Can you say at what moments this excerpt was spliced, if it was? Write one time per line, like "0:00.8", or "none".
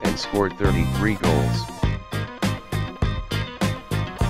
0:03.1